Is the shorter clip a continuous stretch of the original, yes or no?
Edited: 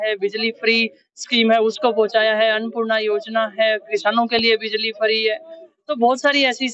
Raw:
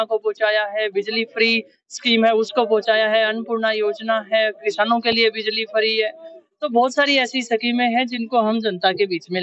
yes